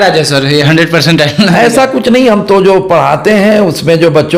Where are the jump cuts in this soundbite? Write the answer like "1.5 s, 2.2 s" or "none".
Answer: none